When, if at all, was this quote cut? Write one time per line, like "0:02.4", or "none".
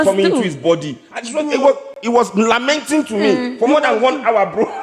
none